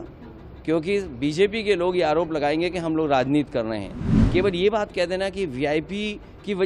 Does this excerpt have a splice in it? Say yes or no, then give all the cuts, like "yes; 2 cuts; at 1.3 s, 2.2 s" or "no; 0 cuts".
yes; 1 cut; at 4.1 s